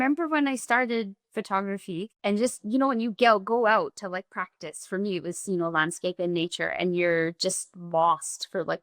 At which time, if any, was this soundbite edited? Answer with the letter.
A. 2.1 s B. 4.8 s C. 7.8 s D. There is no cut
A